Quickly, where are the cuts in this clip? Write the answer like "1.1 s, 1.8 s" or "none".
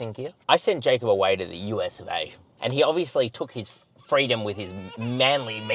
2.5 s